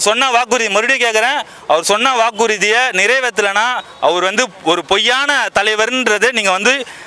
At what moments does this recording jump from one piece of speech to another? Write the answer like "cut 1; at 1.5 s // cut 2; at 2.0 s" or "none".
none